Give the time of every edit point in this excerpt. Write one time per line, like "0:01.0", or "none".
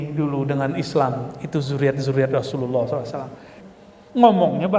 0:03.6